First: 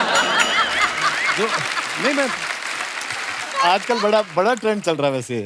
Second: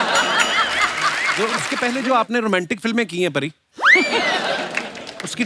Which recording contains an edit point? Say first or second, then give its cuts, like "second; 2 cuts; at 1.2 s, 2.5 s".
second; 1 cut; at 1.7 s